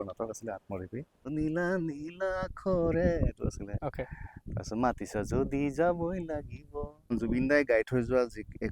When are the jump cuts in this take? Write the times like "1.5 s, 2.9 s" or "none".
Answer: 1.1 s, 7.1 s